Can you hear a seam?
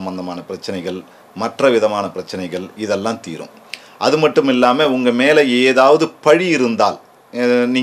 no; 0 cuts

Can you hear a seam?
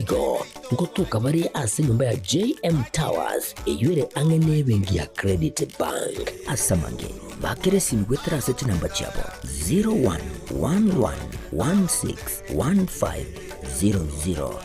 no; 0 cuts

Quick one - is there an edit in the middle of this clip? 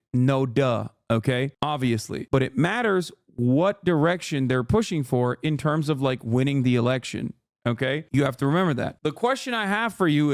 yes; 1 cut; at 8.9 s

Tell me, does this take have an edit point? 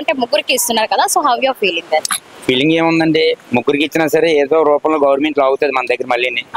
no; 0 cuts

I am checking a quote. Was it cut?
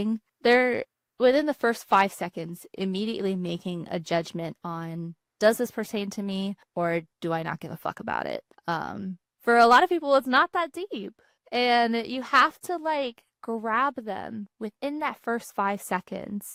no; 0 cuts

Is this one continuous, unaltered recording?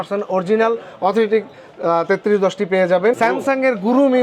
no; 1 cut; at 3.2 s

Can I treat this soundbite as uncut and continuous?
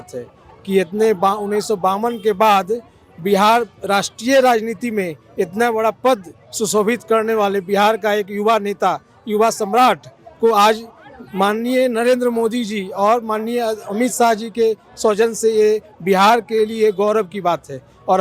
yes; 0 cuts

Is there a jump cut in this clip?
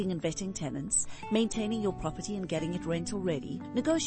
no; 0 cuts

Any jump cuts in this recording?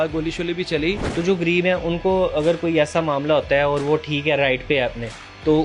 yes; 1 cut; at 1.1 s

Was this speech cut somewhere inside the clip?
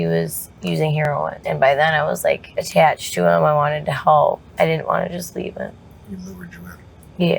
yes; 4 cuts; at 1.0 s, 2.5 s, 4.5 s, 5.9 s

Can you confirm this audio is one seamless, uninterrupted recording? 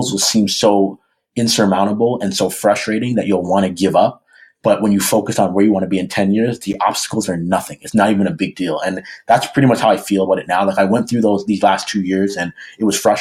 yes; 0 cuts

